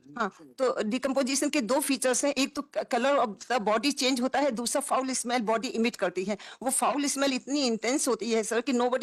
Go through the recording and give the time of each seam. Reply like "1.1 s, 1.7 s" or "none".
none